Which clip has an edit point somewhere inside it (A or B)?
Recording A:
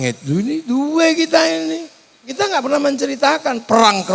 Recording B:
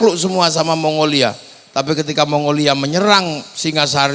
A